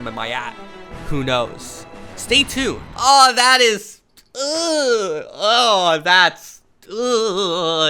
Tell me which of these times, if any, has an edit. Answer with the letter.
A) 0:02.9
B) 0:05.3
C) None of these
A